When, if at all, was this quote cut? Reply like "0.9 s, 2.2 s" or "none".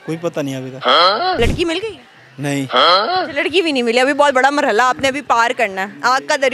1.4 s